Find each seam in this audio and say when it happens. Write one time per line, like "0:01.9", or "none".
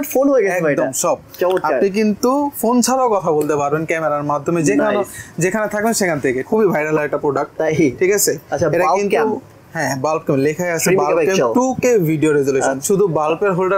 0:06.5
0:12.8